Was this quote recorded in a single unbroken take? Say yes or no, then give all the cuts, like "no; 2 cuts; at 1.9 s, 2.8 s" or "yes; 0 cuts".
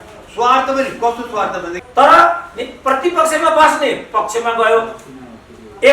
no; 1 cut; at 1.7 s